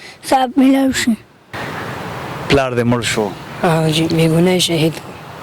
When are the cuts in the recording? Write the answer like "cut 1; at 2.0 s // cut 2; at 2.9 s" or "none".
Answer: cut 1; at 1.5 s